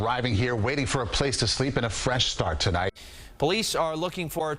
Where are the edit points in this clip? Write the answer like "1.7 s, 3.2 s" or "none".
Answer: 2.9 s